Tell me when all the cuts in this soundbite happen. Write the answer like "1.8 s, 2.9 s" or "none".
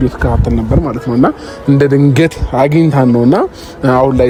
none